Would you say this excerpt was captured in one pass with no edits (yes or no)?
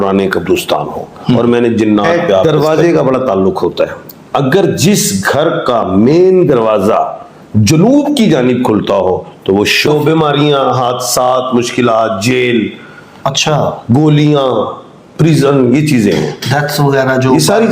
no